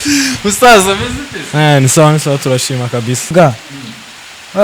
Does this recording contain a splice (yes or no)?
yes